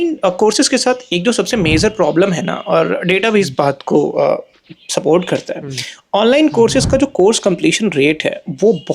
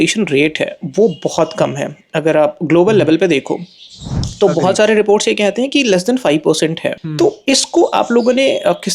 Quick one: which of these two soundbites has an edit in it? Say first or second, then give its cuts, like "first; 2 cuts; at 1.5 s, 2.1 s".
second; 1 cut; at 7.0 s